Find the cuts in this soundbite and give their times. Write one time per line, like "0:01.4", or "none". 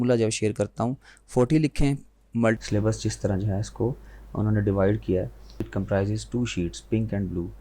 0:02.6
0:05.7